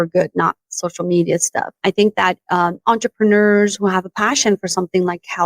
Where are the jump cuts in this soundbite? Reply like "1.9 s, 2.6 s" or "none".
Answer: 1.8 s